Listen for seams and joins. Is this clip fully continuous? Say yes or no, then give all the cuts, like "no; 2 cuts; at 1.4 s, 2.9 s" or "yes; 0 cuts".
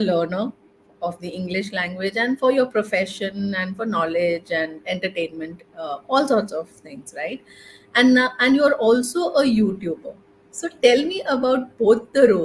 yes; 0 cuts